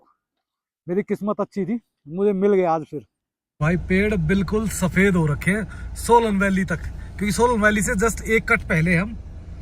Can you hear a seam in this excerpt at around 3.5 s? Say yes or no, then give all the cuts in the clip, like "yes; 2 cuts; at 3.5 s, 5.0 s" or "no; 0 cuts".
yes; 1 cut; at 3.5 s